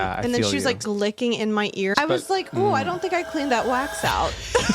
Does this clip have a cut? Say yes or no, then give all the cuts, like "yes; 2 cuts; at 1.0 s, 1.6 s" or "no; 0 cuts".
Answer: yes; 2 cuts; at 0.8 s, 1.9 s